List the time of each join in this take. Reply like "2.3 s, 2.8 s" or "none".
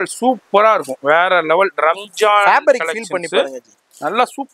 none

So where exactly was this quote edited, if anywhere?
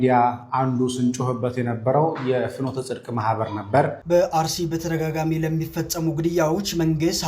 4.0 s

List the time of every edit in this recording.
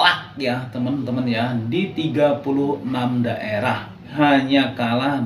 4.1 s

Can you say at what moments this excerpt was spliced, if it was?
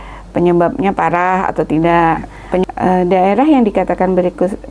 2.6 s

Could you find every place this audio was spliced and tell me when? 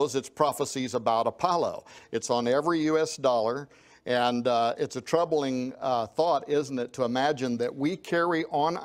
2.0 s

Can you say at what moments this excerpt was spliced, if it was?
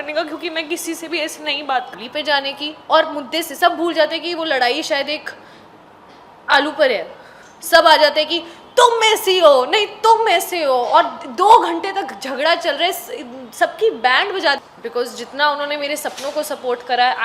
1.9 s, 14.6 s

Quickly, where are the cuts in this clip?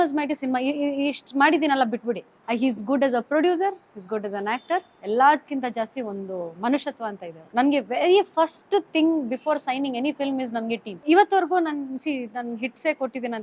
2.3 s, 7.4 s, 10.8 s

